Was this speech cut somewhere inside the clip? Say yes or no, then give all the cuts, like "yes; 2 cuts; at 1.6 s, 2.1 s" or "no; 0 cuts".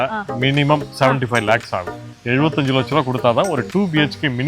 yes; 1 cut; at 2.1 s